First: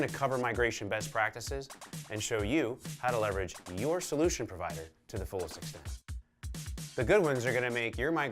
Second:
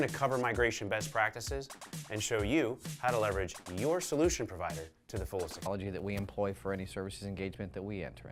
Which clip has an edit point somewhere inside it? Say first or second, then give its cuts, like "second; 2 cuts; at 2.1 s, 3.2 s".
first; 1 cut; at 5.7 s